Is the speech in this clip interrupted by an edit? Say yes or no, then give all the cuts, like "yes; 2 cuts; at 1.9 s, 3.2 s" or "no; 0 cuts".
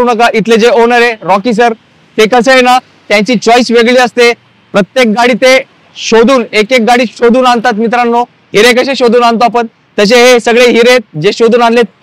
no; 0 cuts